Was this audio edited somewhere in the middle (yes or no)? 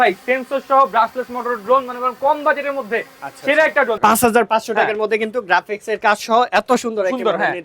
yes